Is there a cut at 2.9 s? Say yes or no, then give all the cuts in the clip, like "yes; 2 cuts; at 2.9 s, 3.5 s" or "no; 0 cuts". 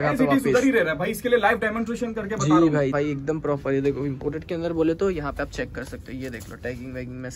yes; 1 cut; at 2.9 s